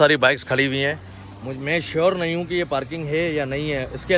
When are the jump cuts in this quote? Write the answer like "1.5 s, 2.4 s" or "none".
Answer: none